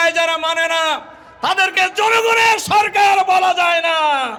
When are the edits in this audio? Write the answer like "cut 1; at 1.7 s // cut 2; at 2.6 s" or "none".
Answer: none